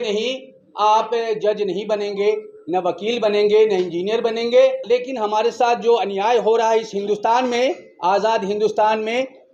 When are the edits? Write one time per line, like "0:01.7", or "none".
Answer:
0:04.8